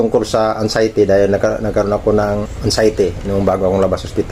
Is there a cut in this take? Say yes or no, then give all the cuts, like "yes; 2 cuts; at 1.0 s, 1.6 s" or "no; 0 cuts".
no; 0 cuts